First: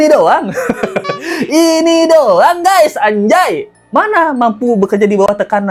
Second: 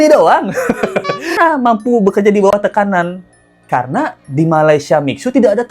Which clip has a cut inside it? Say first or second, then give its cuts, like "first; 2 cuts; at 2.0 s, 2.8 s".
second; 1 cut; at 1.3 s